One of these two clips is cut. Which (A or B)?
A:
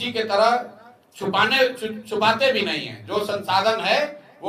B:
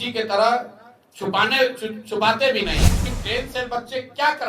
B